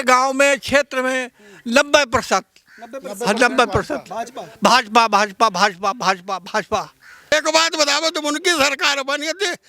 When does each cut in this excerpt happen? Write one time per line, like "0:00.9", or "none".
0:07.3